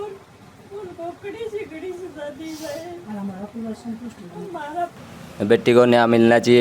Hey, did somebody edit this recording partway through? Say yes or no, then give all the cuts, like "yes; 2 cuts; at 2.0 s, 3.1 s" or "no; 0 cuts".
yes; 1 cut; at 5.0 s